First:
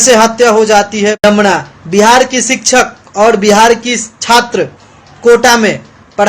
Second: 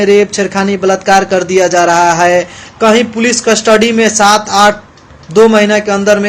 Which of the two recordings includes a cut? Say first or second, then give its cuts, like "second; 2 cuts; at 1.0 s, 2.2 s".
first; 1 cut; at 1.2 s